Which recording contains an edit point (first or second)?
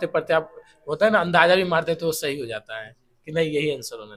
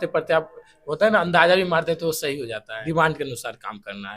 second